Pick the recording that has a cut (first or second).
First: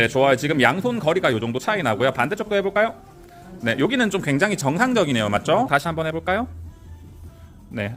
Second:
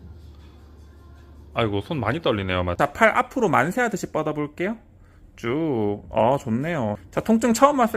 second